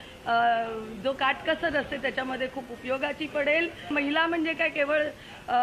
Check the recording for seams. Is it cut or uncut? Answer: cut